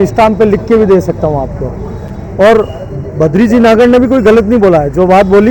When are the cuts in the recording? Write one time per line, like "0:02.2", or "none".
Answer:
none